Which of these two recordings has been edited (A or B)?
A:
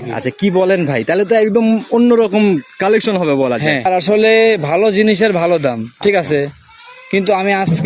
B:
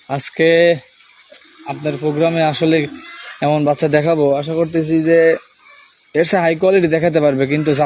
A